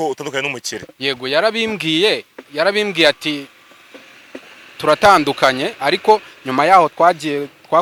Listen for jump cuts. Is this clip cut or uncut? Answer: uncut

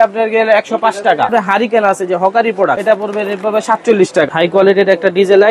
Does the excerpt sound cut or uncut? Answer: cut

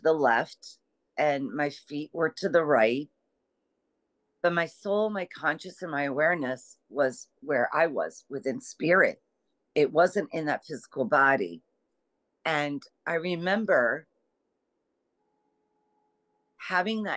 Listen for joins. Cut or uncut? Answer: uncut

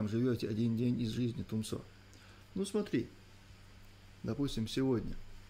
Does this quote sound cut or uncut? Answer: uncut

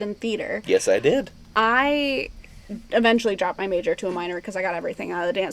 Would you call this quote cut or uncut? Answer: uncut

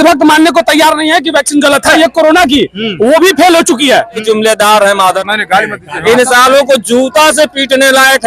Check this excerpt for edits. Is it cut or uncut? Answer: cut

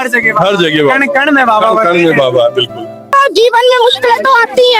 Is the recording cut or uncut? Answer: cut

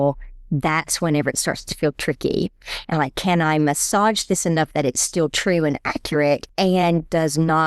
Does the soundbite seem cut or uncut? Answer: cut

